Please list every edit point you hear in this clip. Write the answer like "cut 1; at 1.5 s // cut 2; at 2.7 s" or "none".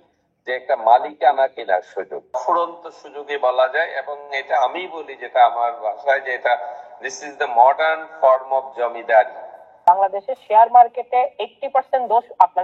cut 1; at 2.2 s // cut 2; at 9.8 s